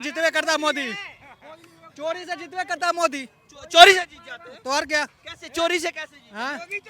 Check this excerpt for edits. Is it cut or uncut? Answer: uncut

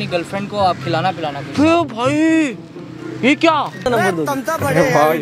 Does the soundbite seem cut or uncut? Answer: cut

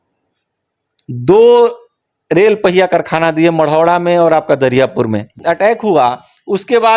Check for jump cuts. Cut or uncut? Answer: cut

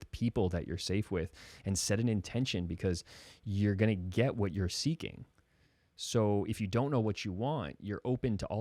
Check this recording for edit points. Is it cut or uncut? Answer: uncut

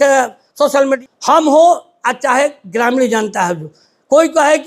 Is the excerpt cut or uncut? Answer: cut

